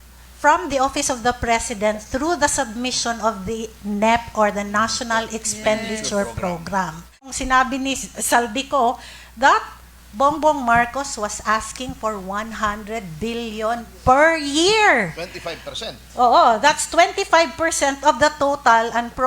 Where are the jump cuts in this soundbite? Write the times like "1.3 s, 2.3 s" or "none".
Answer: 7.4 s